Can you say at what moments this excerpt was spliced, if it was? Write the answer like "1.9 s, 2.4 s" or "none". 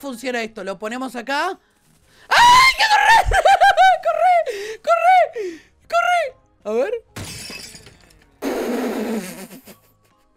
none